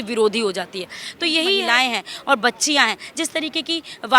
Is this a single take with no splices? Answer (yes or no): no